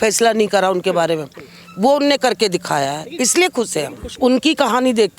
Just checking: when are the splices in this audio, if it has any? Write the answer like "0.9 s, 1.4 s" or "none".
4.1 s